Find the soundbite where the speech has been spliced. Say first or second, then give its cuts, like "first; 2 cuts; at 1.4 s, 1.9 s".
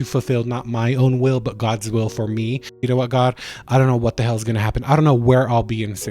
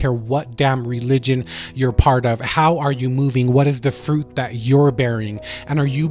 first; 1 cut; at 2.8 s